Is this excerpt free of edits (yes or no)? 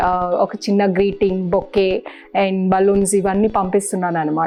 yes